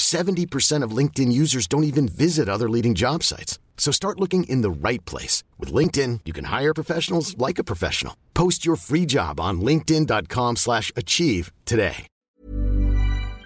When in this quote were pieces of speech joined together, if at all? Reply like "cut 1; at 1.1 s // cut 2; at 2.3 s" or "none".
cut 1; at 12.1 s